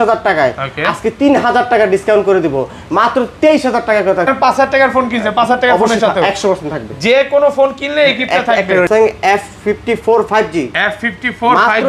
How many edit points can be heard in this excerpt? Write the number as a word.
two